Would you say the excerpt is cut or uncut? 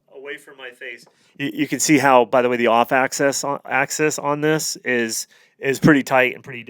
uncut